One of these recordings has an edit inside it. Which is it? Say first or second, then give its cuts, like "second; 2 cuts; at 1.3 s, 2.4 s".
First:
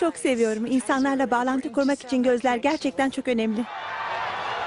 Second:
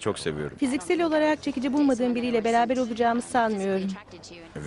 second; 1 cut; at 1.1 s